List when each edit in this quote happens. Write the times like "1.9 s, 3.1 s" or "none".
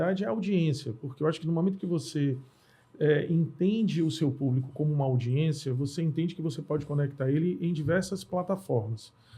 none